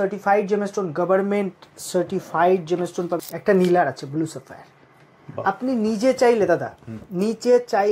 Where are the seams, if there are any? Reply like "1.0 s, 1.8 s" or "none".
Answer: 3.2 s